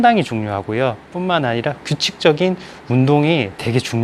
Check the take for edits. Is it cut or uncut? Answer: uncut